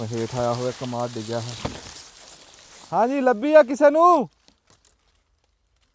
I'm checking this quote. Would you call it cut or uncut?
uncut